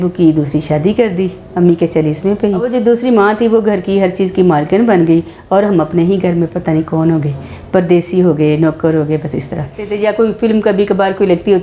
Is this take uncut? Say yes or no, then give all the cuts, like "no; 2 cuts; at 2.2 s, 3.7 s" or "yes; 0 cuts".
no; 2 cuts; at 2.7 s, 9.8 s